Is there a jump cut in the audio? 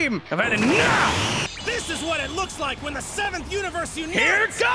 yes; 1 cut; at 1.5 s

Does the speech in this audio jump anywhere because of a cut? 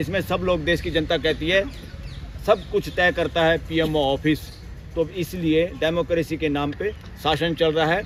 no; 0 cuts

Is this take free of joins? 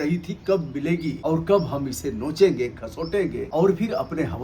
no; 2 cuts; at 1.2 s, 3.4 s

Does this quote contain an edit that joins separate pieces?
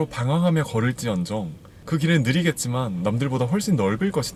no; 0 cuts

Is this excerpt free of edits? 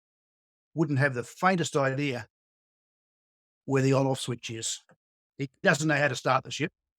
no; 1 cut; at 5.6 s

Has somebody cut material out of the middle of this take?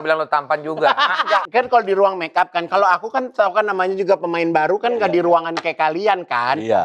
yes; 1 cut; at 1.5 s

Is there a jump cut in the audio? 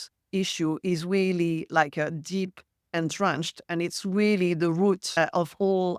yes; 1 cut; at 5.1 s

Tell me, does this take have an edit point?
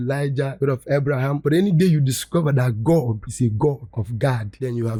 no; 0 cuts

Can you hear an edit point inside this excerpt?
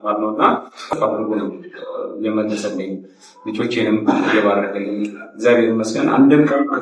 yes; 1 cut; at 1.0 s

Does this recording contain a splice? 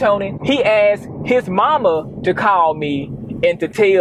no; 0 cuts

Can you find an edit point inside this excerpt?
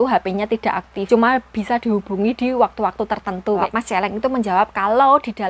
yes; 2 cuts; at 0.9 s, 3.7 s

